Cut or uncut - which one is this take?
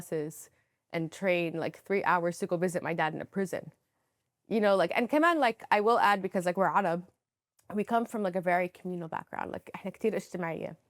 uncut